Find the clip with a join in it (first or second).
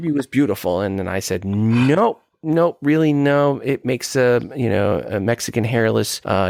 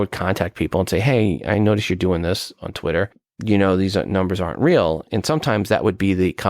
second